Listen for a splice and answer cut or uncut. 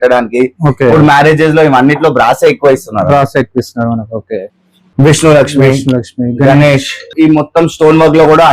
cut